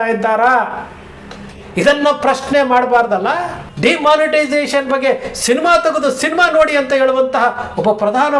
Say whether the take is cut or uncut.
cut